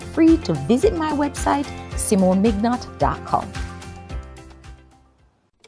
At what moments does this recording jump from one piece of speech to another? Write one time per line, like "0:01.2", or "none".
none